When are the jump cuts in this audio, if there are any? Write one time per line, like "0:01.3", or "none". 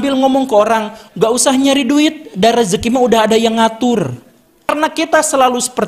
0:04.7